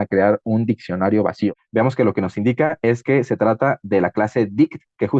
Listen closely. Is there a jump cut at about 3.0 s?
no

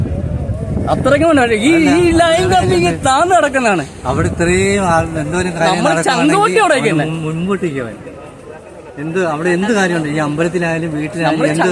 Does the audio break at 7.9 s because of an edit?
no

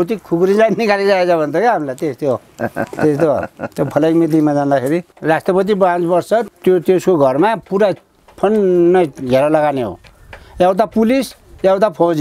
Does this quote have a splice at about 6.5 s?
yes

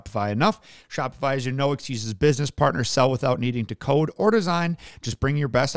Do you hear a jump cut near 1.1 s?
no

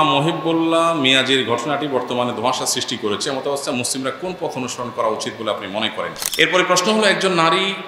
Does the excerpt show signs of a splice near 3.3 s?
no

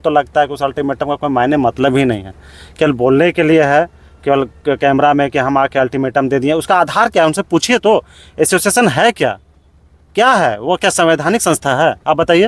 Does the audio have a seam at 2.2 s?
no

